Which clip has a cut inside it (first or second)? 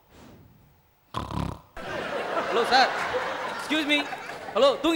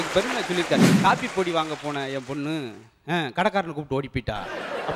second